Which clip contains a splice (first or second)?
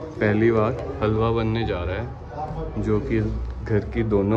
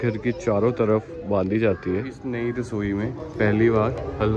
second